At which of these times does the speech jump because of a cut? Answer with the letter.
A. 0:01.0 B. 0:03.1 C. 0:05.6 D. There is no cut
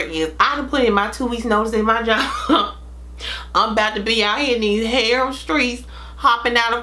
D